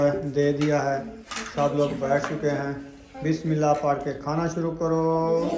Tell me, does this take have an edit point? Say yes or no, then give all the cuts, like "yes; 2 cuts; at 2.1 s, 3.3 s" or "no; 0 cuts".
no; 0 cuts